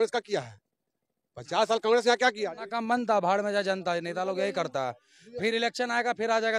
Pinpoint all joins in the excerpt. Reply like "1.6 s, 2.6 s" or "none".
2.7 s